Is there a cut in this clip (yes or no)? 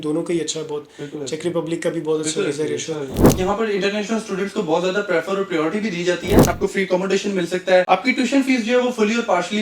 yes